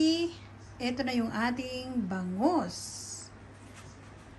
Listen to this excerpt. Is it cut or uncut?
uncut